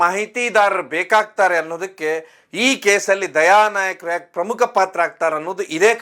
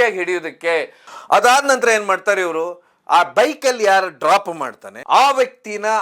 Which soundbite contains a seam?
second; 1 cut; at 1.0 s

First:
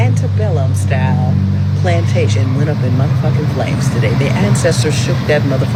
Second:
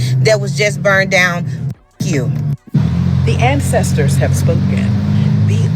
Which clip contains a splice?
second; 1 cut; at 2.6 s

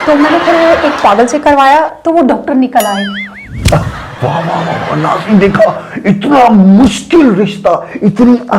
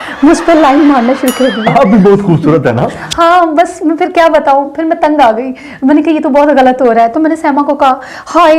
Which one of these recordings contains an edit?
first; 1 cut; at 3.8 s

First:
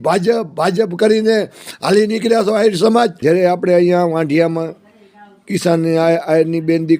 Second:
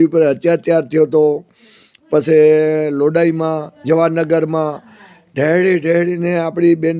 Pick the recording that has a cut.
first; 1 cut; at 3.2 s

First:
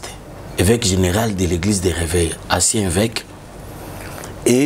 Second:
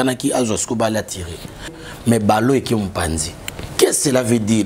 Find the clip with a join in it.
second; 1 cut; at 1.8 s

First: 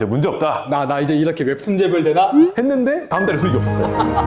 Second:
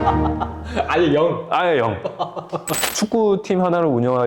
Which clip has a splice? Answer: second; 1 cut; at 2.8 s

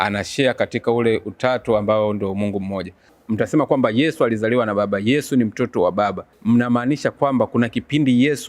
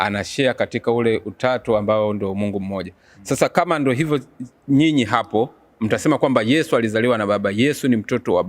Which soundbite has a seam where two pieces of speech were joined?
first; 2 cuts; at 3.1 s, 6.3 s

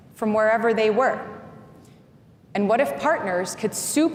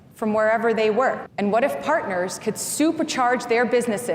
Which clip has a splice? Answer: second; 1 cut; at 1.3 s

